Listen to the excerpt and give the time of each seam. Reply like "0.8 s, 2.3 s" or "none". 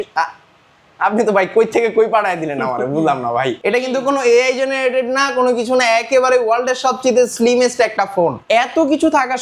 3.6 s, 8.4 s

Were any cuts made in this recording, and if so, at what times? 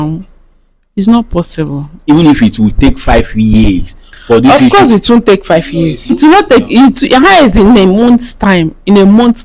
2.0 s, 6.1 s

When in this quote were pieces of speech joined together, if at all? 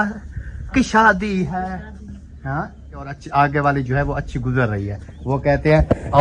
3.2 s

